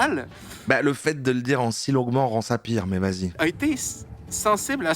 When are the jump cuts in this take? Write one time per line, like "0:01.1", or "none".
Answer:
0:03.2

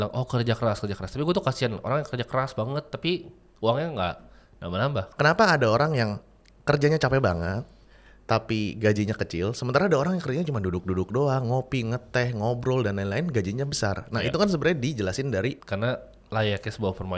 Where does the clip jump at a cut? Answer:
0:05.1
0:15.6

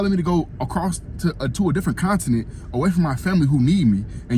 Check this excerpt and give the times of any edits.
none

